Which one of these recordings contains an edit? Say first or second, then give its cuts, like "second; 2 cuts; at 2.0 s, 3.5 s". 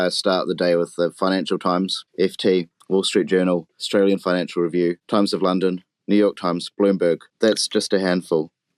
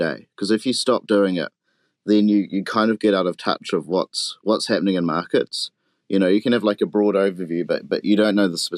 first; 4 cuts; at 2.0 s, 3.8 s, 5.0 s, 7.3 s